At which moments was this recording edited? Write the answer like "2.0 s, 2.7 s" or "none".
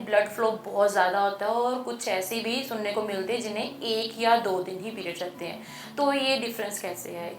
none

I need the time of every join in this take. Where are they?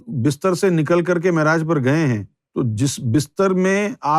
2.3 s

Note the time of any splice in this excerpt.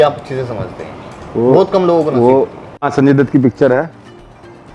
2.9 s

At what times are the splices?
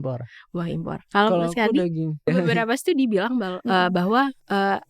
2.3 s

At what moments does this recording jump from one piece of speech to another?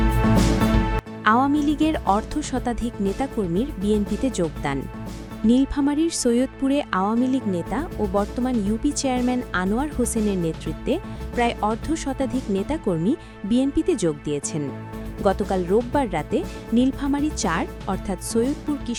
none

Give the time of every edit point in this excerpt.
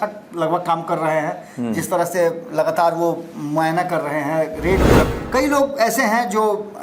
5.1 s

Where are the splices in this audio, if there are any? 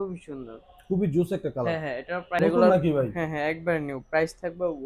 2.4 s

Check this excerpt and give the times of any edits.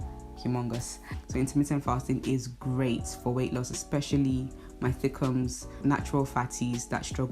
1.1 s

